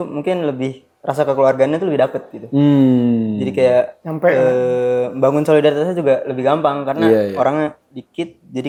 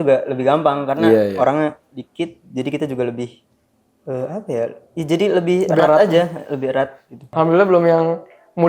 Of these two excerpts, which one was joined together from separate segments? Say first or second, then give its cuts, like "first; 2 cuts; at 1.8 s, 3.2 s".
second; 1 cut; at 7.2 s